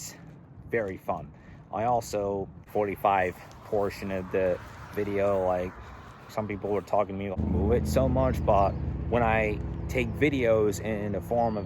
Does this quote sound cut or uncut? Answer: cut